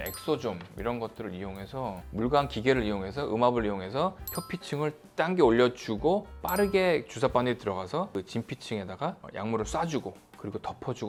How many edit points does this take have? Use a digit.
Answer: 0